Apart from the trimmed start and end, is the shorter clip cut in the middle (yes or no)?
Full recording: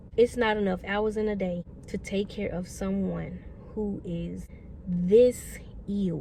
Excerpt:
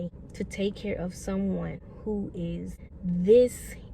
yes